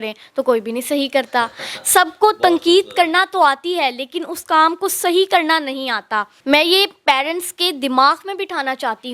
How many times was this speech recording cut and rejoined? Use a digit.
1